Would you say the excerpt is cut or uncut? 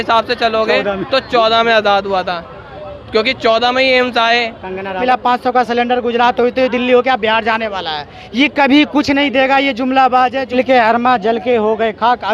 cut